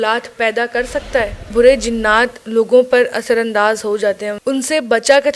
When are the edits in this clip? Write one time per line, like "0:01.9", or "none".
0:01.5
0:04.3